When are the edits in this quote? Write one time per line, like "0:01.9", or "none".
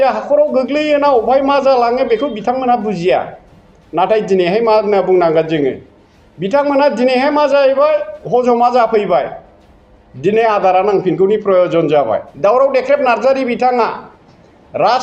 0:12.3